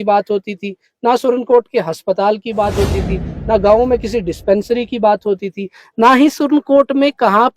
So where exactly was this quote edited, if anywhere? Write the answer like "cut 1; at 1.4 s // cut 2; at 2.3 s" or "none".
none